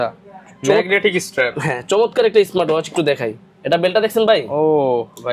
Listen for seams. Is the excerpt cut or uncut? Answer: uncut